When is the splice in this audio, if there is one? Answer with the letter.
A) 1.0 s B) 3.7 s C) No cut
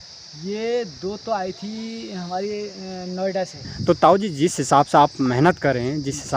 B